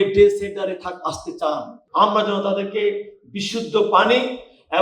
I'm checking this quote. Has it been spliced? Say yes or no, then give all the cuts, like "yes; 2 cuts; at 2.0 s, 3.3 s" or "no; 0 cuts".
yes; 1 cut; at 1.8 s